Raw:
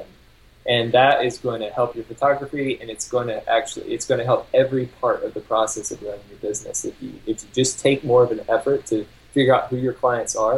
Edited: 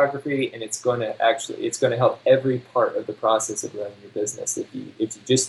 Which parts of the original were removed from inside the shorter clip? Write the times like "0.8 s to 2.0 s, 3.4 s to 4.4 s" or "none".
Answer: none